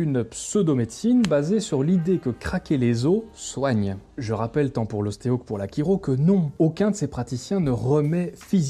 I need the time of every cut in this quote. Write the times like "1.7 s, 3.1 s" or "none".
4.1 s